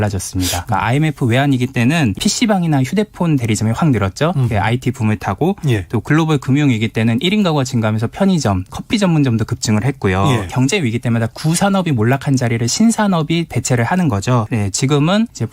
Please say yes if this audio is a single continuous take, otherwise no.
no